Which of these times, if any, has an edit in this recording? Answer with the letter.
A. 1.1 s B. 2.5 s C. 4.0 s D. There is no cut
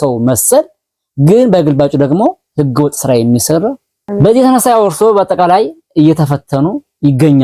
C